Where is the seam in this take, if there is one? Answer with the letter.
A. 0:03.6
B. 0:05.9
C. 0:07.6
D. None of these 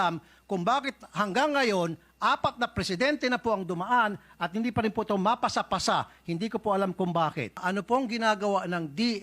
C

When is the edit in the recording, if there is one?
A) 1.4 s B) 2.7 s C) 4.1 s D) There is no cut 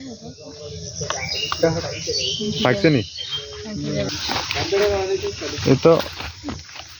C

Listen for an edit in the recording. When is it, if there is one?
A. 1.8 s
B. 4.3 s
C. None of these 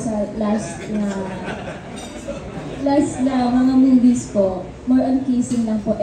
C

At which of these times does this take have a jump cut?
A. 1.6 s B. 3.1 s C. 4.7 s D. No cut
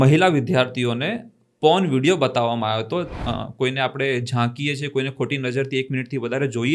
B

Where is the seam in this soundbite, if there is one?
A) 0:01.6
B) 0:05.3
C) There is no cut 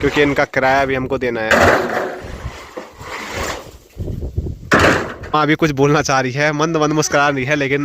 B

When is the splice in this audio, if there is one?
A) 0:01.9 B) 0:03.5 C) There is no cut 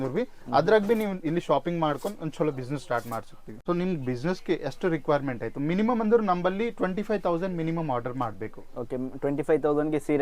B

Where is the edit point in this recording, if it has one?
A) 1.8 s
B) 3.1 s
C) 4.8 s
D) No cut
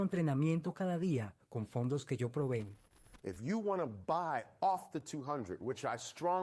D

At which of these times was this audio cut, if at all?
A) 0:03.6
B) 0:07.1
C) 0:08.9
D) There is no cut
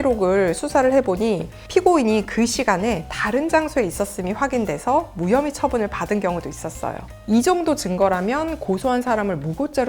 B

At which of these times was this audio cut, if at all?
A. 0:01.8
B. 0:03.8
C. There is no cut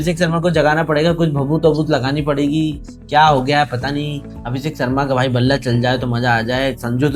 C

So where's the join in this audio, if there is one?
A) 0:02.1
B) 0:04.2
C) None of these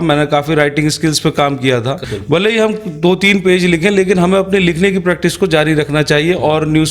A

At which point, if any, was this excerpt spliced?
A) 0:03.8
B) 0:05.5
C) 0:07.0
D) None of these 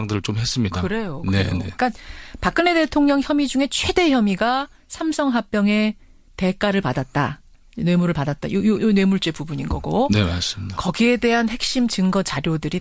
A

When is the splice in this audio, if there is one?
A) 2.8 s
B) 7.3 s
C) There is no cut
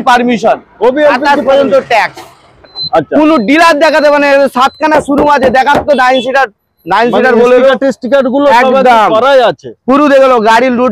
A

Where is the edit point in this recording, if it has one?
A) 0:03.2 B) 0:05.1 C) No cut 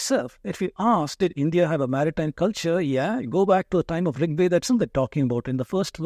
C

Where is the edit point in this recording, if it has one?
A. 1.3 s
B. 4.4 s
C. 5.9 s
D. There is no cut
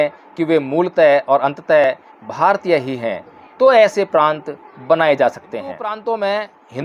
C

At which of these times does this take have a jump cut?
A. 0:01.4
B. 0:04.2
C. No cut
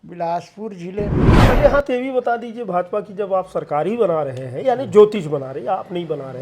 A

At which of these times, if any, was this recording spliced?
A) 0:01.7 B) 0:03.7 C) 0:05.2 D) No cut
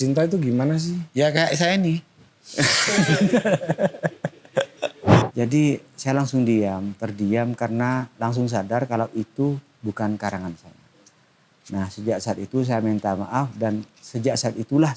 C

